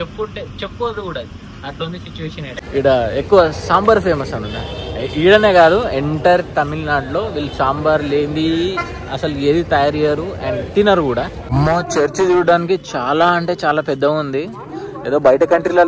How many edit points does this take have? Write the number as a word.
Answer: two